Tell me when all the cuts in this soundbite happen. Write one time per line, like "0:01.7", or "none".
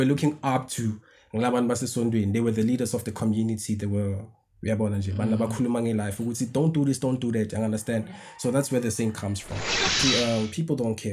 0:10.0